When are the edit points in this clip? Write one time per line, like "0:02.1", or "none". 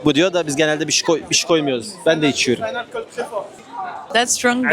0:03.6